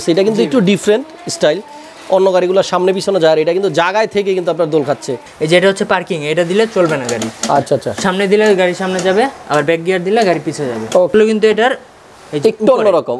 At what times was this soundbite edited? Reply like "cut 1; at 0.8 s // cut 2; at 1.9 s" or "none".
cut 1; at 5.2 s // cut 2; at 11.1 s